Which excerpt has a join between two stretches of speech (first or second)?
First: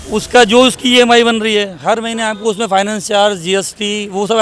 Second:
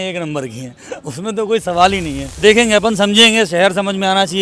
second